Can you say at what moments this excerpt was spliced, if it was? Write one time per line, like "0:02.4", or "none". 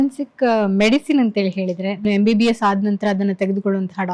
0:02.1